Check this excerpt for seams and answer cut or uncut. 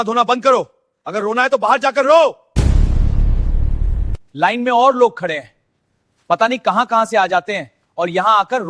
uncut